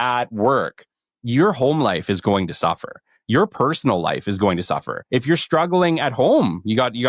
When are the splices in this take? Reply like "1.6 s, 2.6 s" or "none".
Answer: 4.9 s